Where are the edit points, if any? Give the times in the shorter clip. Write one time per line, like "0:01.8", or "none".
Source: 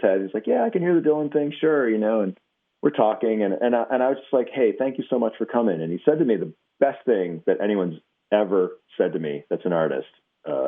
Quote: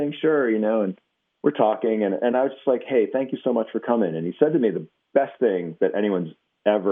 0:02.3